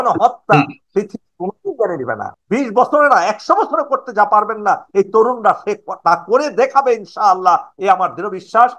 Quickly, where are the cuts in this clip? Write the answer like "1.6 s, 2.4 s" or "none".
2.3 s